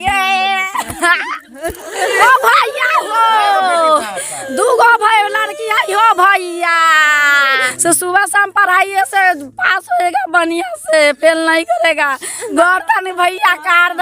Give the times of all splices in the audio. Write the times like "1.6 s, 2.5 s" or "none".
2.2 s, 7.7 s, 12.4 s